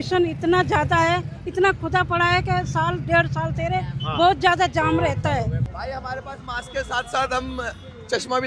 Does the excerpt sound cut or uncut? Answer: cut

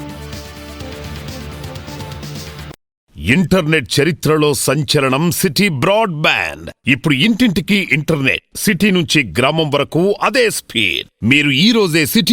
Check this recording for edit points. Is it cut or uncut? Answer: cut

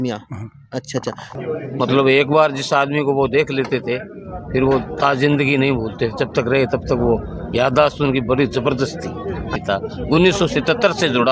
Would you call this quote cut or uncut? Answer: cut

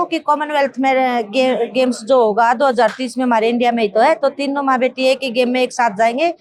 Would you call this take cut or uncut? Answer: uncut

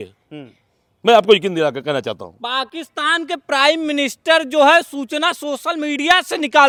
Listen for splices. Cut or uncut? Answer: uncut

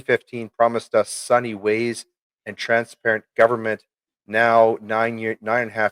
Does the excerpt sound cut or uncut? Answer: uncut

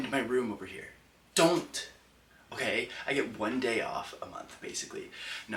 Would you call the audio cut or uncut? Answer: uncut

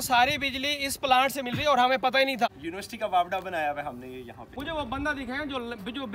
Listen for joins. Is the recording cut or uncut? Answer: cut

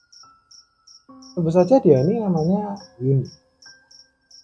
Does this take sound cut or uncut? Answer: uncut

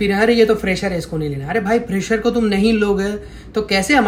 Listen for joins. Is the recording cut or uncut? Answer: uncut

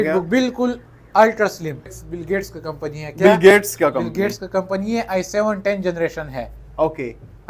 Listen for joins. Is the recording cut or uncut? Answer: cut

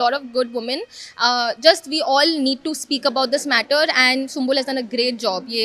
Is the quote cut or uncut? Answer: uncut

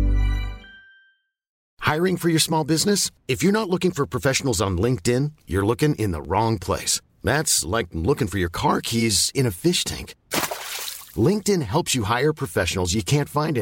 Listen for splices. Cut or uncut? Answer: cut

